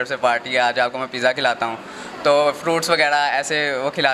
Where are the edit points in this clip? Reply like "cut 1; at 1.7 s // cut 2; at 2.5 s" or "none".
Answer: none